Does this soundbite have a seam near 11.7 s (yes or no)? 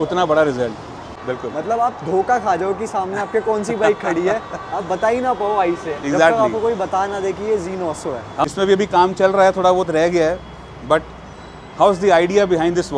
no